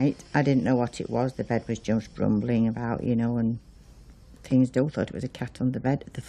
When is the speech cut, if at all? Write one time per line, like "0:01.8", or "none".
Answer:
0:00.9

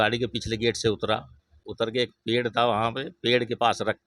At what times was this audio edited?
none

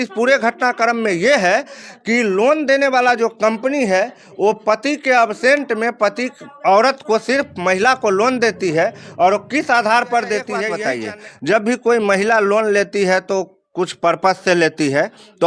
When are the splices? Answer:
0:10.7

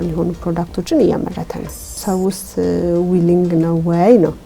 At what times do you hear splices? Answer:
0:01.9

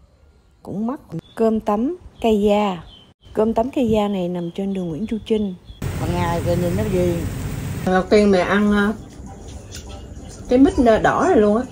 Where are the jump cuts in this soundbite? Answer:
0:01.1
0:05.8
0:07.9

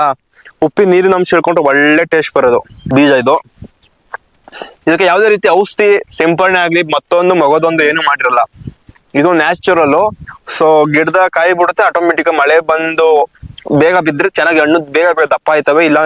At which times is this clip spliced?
0:02.8

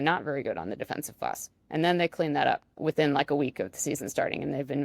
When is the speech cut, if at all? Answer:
0:02.7

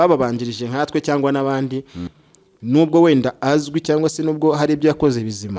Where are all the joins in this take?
0:02.1

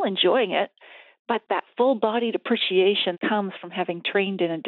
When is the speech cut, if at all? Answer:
0:01.4
0:03.2

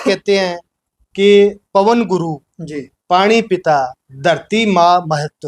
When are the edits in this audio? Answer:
none

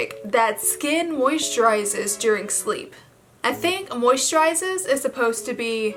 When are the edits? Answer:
none

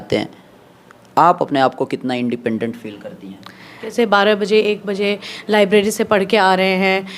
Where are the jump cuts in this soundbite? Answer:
0:03.9

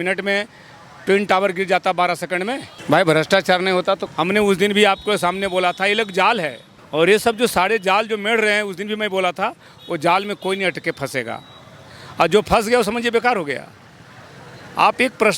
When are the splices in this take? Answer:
none

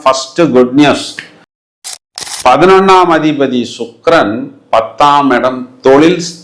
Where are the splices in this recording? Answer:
0:01.8

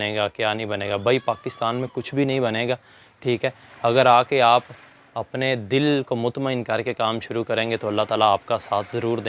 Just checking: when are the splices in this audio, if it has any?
none

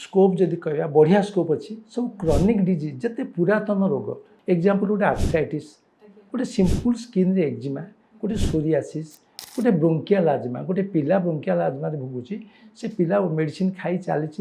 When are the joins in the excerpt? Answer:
0:04.3
0:09.4

